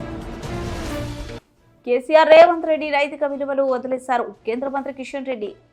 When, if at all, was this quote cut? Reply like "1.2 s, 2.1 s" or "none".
1.3 s